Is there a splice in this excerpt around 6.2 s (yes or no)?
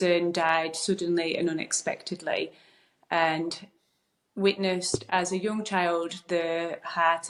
no